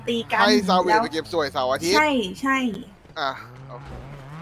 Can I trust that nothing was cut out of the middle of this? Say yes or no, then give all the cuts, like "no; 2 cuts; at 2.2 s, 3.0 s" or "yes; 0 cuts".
yes; 0 cuts